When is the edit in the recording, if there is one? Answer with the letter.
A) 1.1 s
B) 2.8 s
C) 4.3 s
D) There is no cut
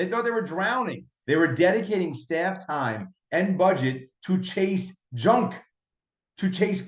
A